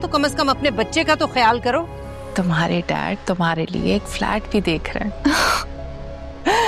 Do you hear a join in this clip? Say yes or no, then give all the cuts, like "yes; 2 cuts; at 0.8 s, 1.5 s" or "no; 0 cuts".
yes; 1 cut; at 2.2 s